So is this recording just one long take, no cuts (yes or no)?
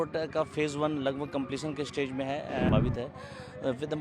no